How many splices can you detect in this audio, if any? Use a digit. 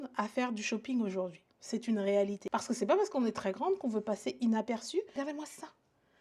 2